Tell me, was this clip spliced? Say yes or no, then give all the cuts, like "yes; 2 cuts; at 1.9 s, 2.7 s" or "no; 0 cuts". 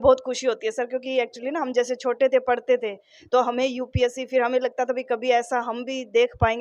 no; 0 cuts